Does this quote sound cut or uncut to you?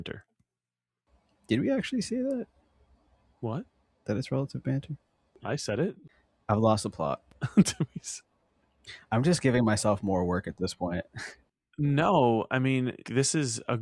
uncut